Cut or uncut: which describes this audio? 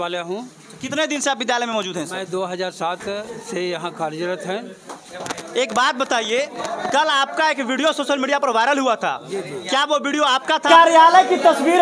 cut